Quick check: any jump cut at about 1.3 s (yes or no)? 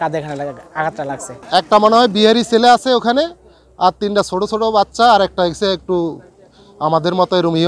yes